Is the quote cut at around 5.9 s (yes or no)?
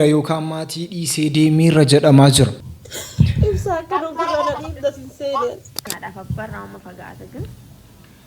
yes